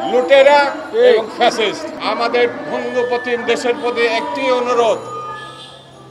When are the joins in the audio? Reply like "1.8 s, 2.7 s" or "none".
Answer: 1.9 s